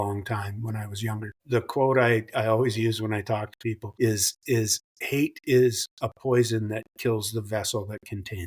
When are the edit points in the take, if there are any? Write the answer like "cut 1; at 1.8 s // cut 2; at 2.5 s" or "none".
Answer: cut 1; at 1.4 s // cut 2; at 3.8 s